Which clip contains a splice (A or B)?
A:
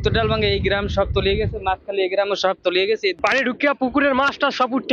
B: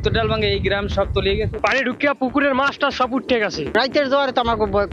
B